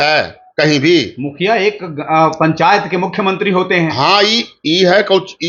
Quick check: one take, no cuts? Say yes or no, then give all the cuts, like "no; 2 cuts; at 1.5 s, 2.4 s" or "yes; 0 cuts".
yes; 0 cuts